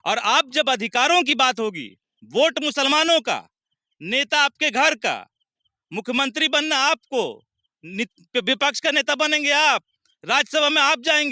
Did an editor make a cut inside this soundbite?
no; 0 cuts

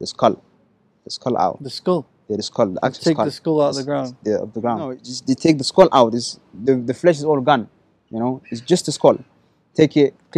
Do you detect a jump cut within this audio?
yes; 1 cut; at 5.1 s

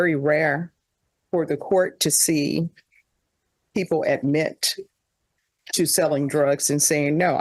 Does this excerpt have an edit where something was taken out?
no; 0 cuts

